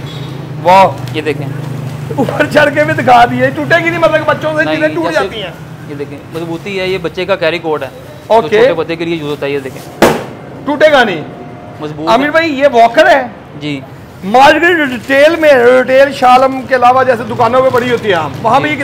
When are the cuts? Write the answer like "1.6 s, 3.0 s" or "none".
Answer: none

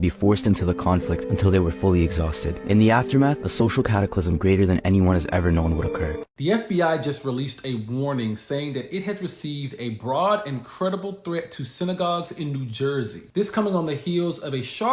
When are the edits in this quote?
6.3 s

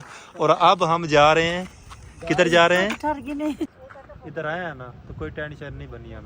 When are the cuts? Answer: 3.7 s

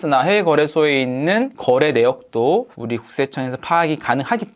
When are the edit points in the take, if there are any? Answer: 2.8 s

